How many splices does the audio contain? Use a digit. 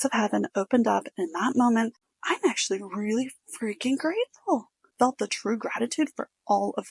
2